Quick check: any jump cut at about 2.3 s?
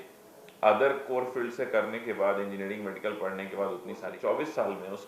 no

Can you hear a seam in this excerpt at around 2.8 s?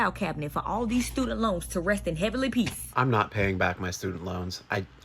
yes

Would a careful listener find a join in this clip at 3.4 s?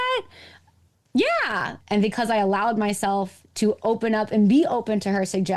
no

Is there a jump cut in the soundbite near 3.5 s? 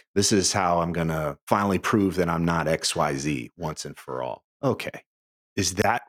no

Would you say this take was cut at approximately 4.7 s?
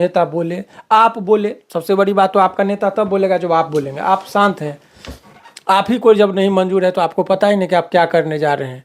no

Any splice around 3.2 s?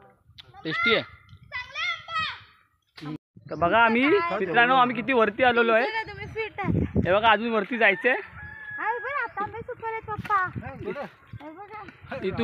yes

